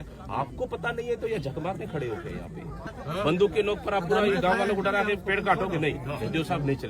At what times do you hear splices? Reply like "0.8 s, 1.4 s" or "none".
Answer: 2.8 s